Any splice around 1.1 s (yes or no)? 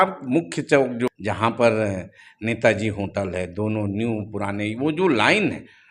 yes